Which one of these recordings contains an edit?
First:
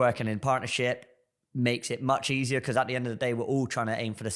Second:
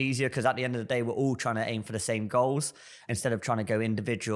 second; 1 cut; at 3.0 s

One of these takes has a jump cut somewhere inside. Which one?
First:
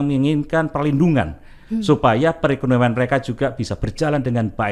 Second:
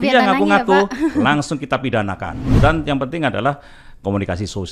second; 1 cut; at 2.3 s

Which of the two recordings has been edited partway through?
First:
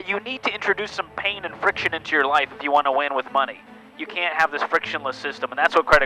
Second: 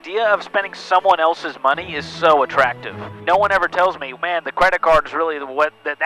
second; 1 cut; at 3.1 s

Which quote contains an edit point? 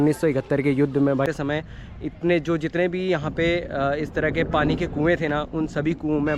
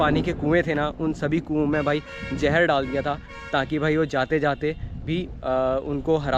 first; 1 cut; at 1.2 s

